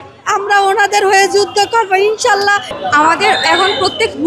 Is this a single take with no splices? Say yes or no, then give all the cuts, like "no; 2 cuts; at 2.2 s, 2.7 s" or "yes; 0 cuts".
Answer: no; 1 cut; at 2.8 s